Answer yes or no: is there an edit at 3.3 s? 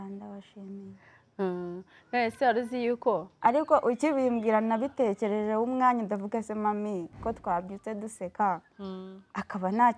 yes